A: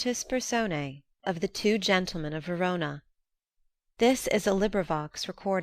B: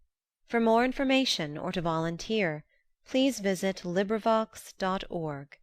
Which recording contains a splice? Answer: A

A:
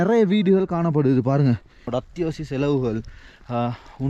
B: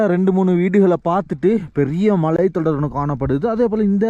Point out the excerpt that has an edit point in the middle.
A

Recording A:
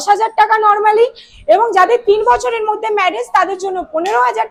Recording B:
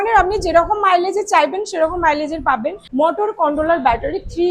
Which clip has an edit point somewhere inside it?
B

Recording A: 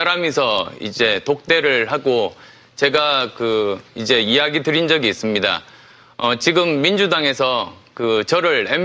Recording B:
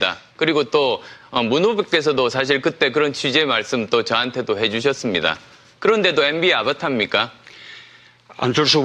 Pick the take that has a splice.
B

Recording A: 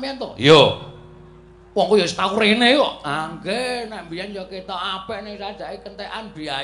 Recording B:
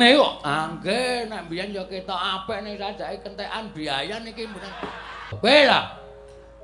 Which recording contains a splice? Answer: B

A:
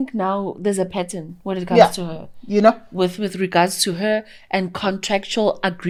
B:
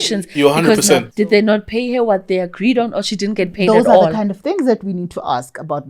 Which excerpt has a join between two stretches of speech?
B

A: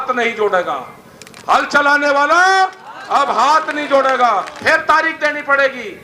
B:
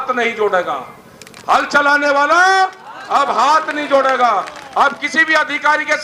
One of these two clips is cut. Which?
A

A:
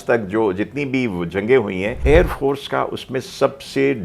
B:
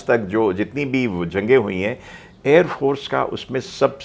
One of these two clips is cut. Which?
A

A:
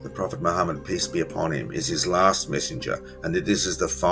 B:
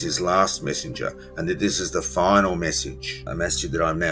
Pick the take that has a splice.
B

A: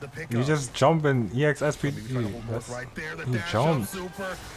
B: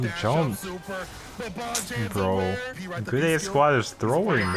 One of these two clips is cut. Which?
B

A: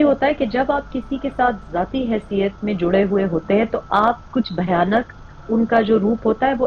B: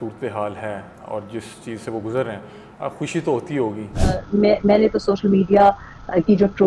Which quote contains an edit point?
B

